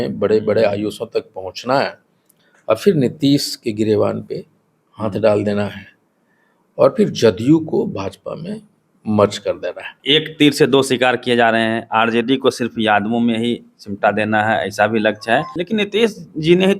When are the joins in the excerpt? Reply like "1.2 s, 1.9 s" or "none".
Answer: 9.9 s, 15.6 s